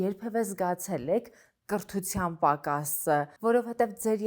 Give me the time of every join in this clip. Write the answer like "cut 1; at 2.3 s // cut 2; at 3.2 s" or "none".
cut 1; at 3.3 s